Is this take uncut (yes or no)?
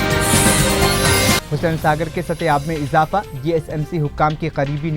no